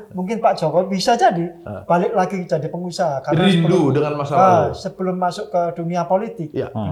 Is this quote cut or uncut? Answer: uncut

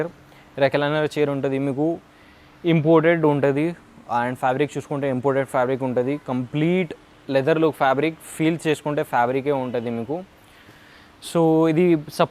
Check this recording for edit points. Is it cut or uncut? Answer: uncut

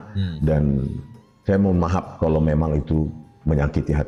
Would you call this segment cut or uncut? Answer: uncut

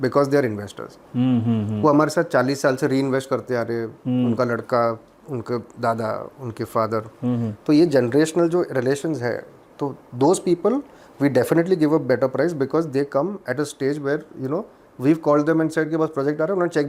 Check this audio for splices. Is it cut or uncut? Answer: uncut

